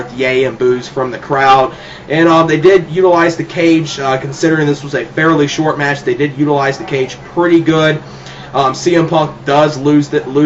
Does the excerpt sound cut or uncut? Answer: uncut